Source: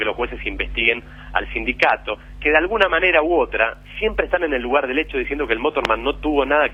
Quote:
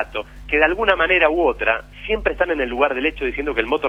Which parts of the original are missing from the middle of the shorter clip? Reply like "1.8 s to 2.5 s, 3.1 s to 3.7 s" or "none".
none